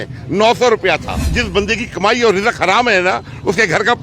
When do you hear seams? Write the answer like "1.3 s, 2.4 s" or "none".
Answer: 1.3 s